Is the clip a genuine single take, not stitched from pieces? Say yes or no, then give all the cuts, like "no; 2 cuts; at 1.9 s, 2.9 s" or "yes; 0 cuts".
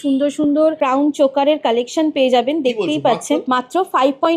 no; 2 cuts; at 0.8 s, 3.4 s